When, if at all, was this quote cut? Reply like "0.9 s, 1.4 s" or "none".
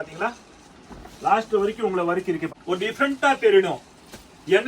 2.4 s